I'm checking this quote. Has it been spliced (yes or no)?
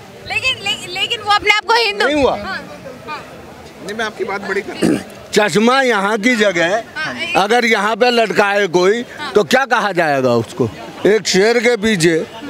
yes